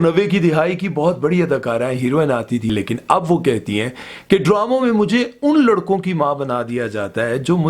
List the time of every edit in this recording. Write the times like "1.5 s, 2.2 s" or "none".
2.7 s